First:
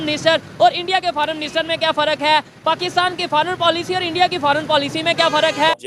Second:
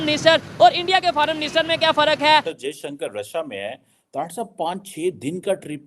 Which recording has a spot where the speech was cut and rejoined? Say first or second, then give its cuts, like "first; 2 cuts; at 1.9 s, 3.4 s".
second; 1 cut; at 2.6 s